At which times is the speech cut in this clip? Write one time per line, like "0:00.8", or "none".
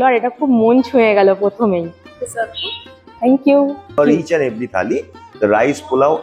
0:02.0
0:04.0